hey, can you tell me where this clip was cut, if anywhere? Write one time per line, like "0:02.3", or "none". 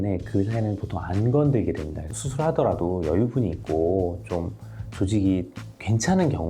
0:02.0